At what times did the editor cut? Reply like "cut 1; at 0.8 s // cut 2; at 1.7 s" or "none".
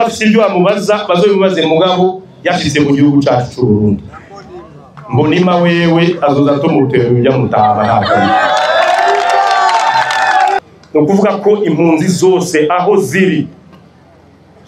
cut 1; at 10.6 s